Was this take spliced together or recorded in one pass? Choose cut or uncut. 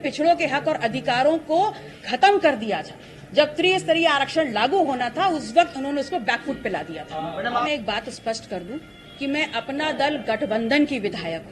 cut